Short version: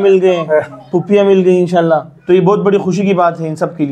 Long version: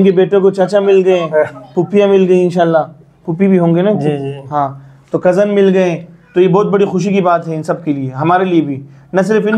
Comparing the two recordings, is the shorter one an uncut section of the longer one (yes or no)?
no